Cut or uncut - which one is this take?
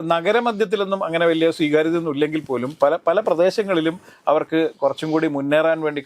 uncut